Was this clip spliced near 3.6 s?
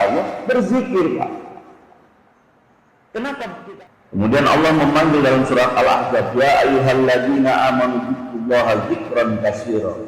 yes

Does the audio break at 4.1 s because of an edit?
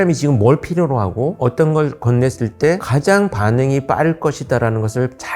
no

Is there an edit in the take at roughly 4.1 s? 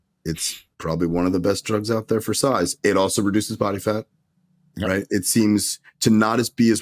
no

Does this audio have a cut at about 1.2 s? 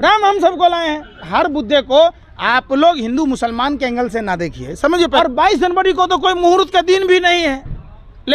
yes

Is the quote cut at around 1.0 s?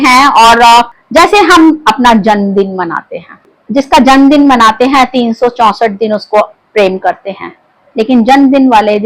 yes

